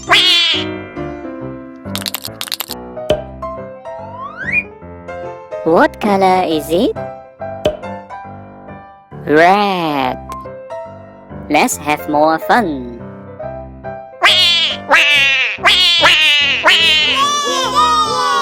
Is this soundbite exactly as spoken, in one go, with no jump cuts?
no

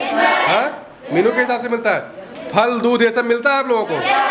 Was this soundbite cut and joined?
no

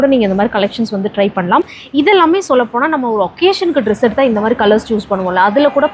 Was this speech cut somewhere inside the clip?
yes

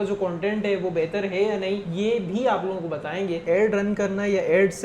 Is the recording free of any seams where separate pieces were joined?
no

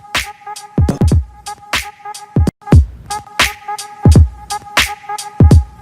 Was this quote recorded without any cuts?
yes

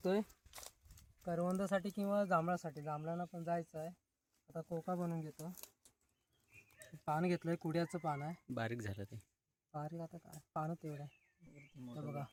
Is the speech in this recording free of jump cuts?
yes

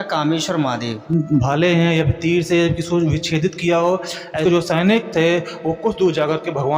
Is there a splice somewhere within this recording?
yes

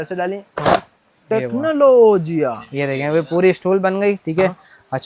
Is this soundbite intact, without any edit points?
yes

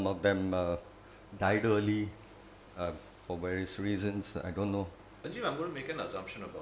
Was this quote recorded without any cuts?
no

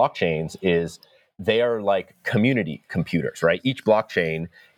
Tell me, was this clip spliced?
no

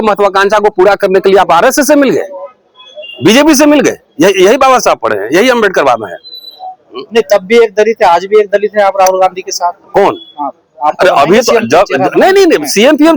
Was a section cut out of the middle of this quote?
no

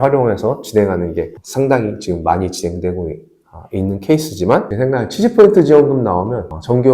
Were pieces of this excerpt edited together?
yes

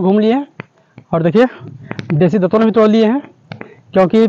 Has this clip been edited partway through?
no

